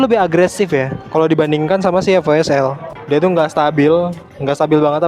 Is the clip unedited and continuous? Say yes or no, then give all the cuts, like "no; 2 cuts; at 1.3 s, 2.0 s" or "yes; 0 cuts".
no; 1 cut; at 2.8 s